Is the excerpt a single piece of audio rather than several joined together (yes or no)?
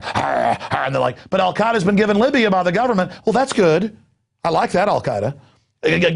yes